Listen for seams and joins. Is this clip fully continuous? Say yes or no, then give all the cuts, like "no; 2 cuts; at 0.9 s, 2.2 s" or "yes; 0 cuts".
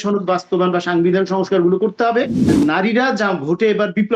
no; 1 cut; at 2.5 s